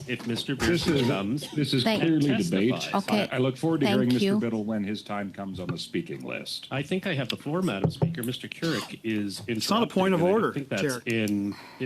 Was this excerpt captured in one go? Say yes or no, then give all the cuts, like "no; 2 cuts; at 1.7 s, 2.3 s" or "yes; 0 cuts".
no; 1 cut; at 1.5 s